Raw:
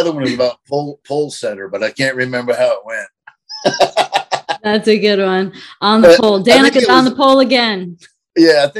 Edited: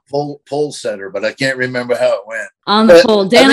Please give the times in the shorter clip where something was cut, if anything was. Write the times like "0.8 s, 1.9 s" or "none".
2.5 s